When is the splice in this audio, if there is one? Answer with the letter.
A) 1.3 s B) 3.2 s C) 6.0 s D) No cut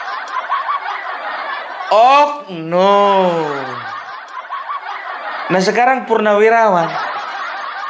D